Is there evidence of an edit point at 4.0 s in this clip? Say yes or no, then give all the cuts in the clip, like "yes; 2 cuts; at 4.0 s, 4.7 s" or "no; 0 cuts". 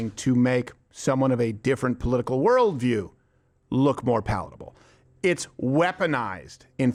no; 0 cuts